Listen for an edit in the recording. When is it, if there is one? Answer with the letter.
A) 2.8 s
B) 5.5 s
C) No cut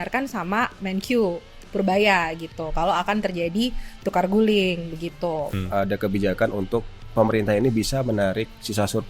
B